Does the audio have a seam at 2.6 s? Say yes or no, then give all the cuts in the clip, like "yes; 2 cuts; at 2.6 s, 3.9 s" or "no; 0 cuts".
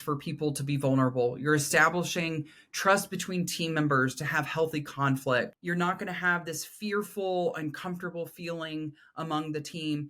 no; 1 cut; at 5.6 s